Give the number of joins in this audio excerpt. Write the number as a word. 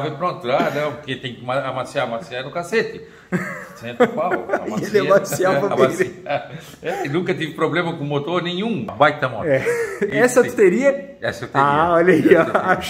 one